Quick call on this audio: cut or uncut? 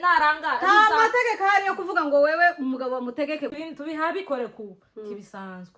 cut